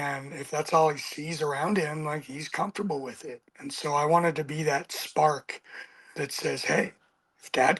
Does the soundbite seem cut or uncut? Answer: uncut